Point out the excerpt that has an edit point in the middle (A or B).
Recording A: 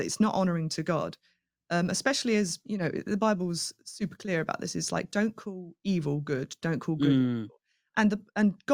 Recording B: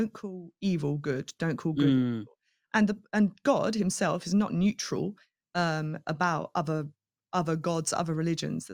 A